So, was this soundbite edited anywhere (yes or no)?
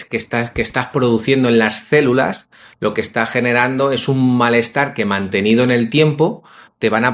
no